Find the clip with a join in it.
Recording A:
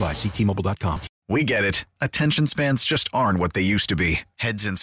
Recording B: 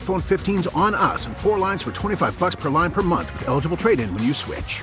A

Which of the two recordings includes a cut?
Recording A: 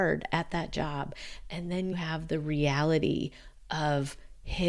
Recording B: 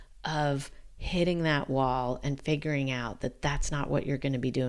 A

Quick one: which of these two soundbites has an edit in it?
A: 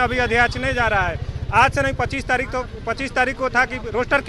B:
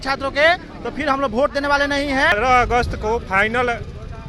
B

